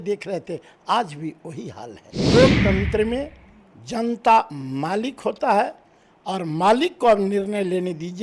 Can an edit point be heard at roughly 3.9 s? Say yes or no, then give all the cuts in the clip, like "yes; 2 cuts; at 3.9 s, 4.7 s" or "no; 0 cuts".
no; 1 cut; at 2.3 s